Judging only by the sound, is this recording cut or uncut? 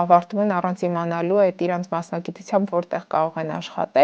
uncut